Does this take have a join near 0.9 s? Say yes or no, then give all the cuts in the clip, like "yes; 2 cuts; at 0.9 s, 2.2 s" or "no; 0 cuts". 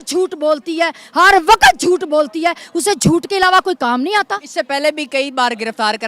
no; 0 cuts